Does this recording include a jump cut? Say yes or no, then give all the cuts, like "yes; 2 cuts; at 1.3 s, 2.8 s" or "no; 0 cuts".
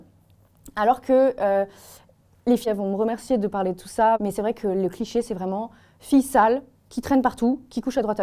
yes; 2 cuts; at 2.7 s, 4.2 s